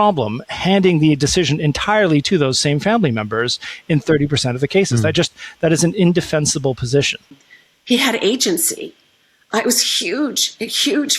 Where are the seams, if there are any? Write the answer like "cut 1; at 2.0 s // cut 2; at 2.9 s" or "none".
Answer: cut 1; at 7.5 s